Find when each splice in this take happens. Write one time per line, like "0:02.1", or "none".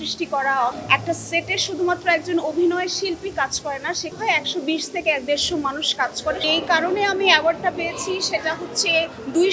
0:00.8
0:04.1
0:06.4

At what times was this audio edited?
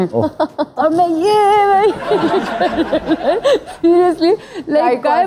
none

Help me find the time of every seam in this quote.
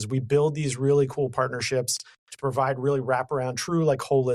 none

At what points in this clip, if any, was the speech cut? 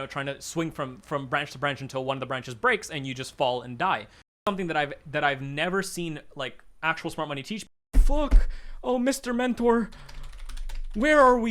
0:04.4
0:07.8

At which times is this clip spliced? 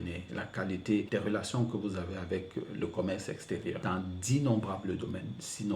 0:01.1
0:03.8

